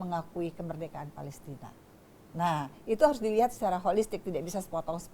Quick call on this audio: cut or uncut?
uncut